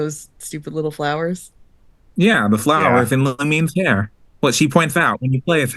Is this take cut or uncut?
uncut